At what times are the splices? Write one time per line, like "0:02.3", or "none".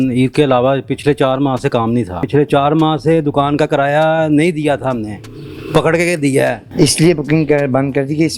0:02.2
0:06.6